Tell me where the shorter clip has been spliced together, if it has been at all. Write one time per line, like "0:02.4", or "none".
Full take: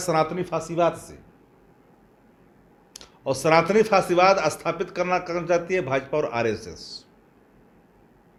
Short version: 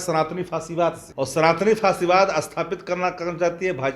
0:01.0